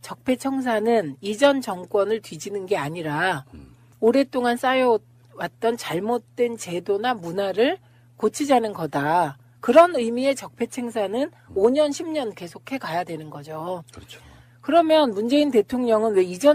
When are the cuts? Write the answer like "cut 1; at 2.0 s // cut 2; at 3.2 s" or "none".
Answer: cut 1; at 10.4 s